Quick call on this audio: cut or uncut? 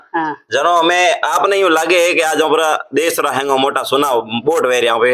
uncut